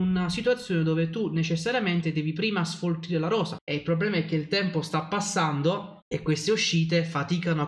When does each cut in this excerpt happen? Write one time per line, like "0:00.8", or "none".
0:03.6
0:06.0